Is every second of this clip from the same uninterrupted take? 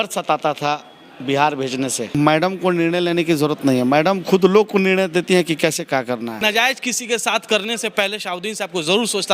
no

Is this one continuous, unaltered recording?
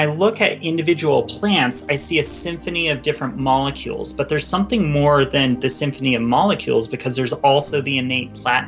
yes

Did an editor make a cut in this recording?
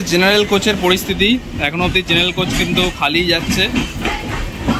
no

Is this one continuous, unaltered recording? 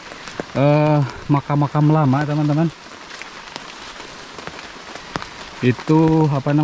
yes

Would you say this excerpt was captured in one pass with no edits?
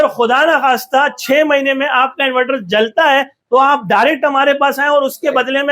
yes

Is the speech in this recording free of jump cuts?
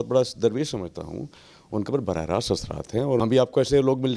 no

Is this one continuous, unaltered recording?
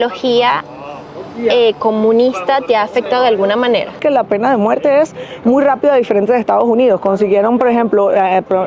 no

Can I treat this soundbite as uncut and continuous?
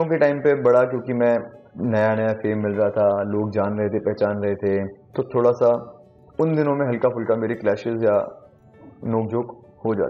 no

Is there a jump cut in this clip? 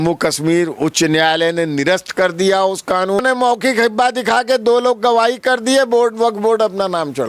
yes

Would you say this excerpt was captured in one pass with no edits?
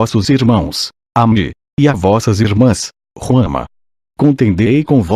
no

